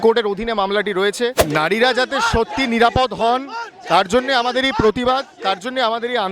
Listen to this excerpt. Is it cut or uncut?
cut